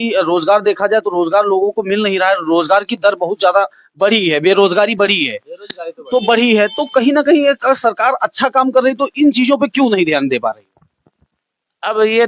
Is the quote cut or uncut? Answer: uncut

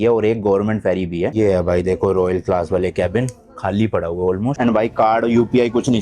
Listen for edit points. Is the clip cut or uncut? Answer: cut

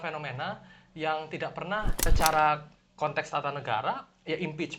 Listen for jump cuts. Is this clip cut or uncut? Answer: cut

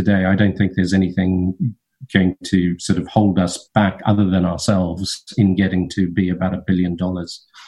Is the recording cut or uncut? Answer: uncut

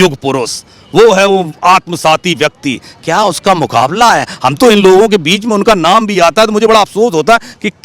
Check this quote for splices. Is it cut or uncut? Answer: uncut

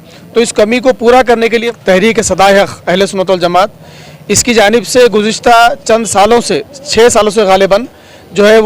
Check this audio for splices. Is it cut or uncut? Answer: cut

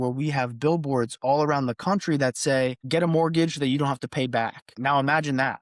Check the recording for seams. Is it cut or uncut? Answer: cut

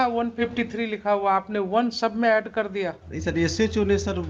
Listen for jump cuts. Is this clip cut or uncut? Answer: cut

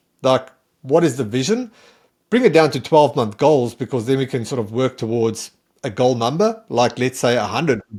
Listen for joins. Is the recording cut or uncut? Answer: uncut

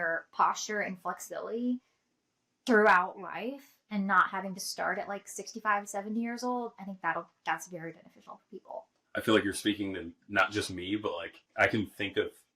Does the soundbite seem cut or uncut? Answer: cut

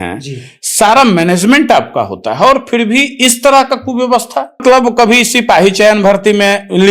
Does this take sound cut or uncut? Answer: cut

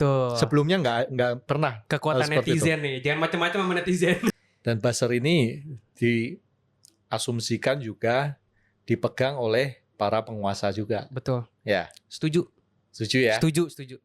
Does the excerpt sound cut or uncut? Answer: cut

